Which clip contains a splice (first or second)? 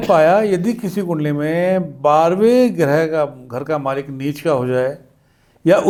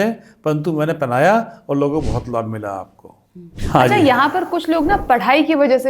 second